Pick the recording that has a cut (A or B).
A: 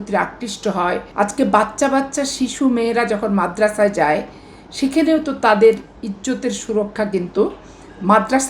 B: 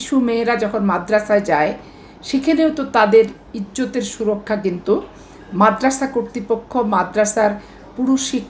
A